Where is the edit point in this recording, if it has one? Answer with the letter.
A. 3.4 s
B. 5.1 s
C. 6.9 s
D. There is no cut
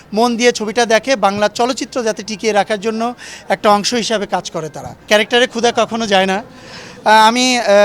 B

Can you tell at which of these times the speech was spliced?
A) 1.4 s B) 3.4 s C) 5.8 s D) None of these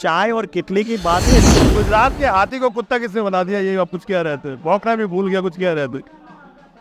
A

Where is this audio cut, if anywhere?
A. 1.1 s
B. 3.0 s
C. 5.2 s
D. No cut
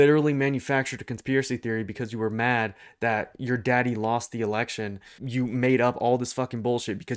C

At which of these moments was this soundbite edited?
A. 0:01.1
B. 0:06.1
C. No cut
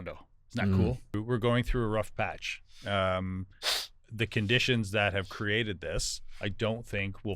A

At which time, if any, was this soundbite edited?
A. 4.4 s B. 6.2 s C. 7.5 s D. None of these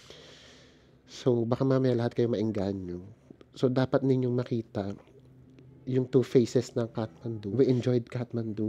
C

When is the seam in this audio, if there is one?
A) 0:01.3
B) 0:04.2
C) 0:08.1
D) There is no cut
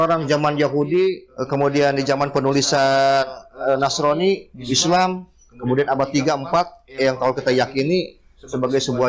A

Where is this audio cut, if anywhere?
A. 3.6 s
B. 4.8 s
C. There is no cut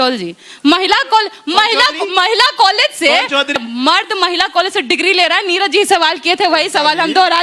A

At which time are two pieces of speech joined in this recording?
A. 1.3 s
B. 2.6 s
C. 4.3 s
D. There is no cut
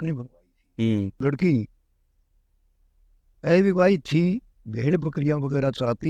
A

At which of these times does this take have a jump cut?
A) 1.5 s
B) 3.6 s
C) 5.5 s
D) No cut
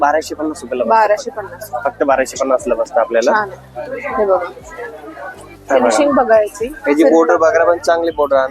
C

